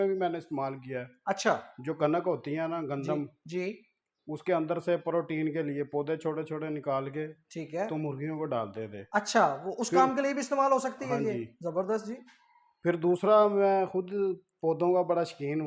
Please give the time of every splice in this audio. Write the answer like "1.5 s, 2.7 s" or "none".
none